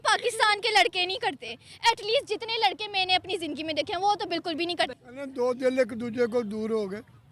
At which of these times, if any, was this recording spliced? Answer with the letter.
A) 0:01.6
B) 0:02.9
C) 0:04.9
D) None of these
C